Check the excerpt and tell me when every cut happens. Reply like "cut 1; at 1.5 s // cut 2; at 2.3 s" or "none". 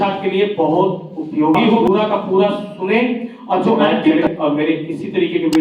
cut 1; at 1.8 s // cut 2; at 4.3 s

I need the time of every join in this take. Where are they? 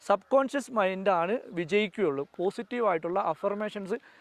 cut 1; at 2.3 s

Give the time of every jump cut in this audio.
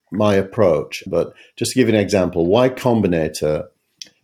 cut 1; at 1.0 s

